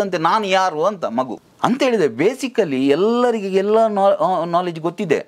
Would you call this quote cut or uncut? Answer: cut